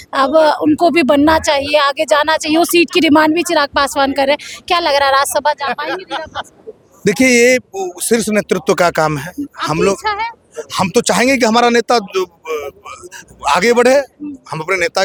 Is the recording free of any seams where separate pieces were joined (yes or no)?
yes